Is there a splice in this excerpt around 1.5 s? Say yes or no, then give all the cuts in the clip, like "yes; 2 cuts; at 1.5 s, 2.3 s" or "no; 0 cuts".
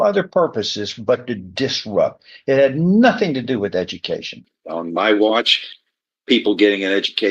no; 1 cut; at 4.5 s